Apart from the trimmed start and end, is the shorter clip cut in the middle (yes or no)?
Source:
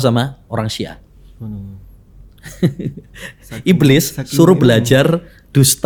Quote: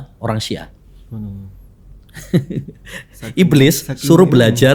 no